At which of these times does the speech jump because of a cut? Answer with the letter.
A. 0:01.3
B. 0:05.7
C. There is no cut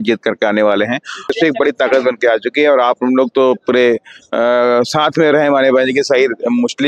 A